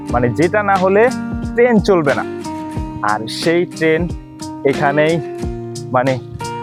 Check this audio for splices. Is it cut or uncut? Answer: uncut